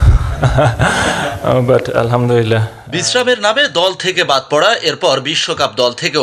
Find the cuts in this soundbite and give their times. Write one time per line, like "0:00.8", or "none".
none